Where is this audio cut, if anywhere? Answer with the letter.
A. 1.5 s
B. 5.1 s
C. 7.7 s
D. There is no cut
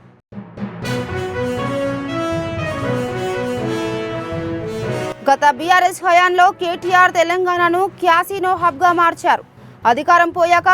B